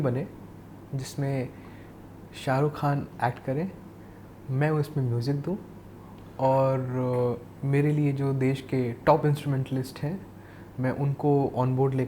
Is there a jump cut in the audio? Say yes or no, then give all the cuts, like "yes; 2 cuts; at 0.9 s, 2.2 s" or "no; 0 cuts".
no; 0 cuts